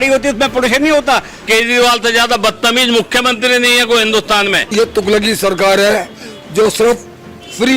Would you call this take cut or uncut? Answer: cut